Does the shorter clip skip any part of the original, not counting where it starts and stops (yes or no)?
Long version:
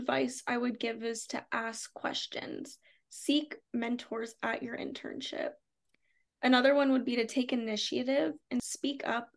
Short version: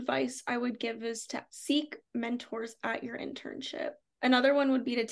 yes